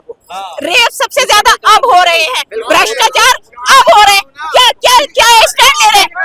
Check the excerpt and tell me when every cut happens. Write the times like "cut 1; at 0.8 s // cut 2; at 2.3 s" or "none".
none